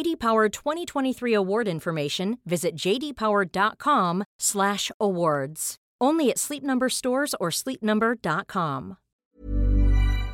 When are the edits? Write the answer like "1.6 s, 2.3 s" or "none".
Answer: 9.3 s